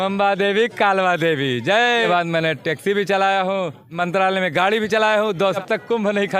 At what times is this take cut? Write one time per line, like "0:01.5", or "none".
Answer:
0:01.9
0:04.0
0:05.6